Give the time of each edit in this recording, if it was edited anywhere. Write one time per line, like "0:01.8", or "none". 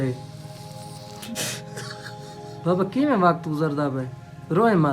0:01.3